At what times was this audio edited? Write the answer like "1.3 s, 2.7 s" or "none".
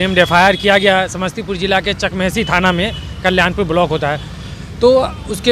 none